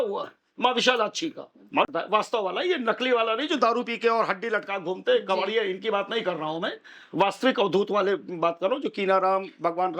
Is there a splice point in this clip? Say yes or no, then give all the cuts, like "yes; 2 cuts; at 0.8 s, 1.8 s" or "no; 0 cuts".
yes; 1 cut; at 1.9 s